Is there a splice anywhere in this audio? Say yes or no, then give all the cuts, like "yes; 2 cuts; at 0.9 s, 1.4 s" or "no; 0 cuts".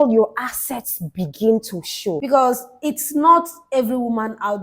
yes; 1 cut; at 2.2 s